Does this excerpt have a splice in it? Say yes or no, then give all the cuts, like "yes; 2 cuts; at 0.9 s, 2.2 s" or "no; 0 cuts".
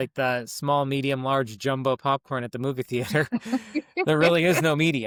no; 0 cuts